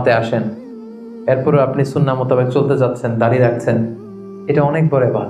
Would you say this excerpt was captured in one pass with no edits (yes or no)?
yes